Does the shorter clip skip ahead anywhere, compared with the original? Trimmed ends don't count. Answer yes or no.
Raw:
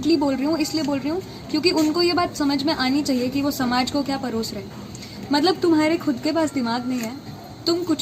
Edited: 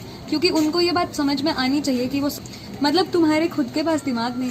yes